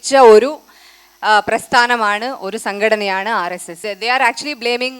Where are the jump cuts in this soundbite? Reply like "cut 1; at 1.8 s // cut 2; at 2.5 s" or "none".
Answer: cut 1; at 3.7 s